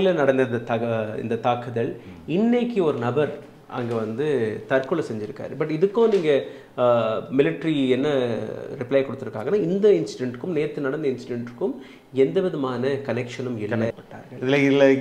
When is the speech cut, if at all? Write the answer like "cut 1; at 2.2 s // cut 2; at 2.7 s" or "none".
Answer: cut 1; at 13.9 s